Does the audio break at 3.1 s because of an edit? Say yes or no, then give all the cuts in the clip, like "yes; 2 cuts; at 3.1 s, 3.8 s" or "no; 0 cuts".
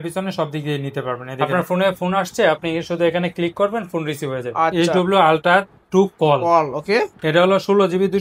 no; 2 cuts; at 1.5 s, 4.7 s